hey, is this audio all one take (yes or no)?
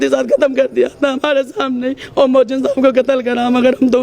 yes